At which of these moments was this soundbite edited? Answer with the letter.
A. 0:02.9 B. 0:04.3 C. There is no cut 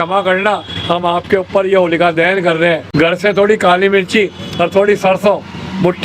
A